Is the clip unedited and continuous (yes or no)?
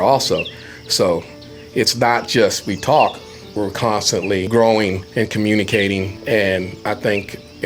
no